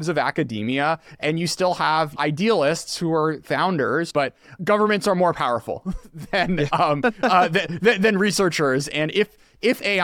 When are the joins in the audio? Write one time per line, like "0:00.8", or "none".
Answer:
0:02.1
0:04.2